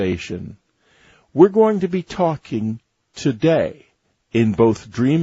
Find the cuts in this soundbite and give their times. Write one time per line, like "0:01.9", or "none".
0:02.1

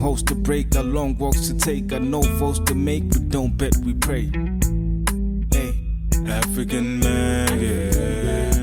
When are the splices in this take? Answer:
none

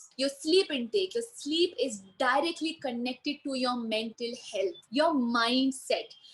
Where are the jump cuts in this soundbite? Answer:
0:04.8

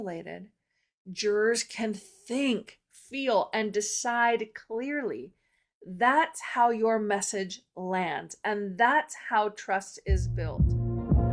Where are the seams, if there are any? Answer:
0:10.4

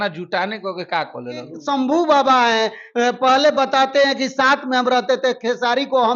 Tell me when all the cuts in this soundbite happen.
0:01.5

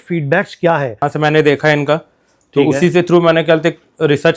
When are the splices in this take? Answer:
0:01.0

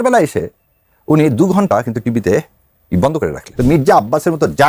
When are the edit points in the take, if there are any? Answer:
0:03.5

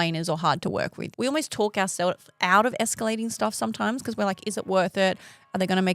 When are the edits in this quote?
0:01.0

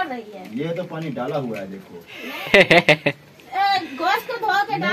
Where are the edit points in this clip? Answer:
none

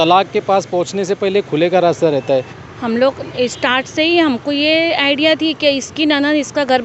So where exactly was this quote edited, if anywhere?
0:02.6

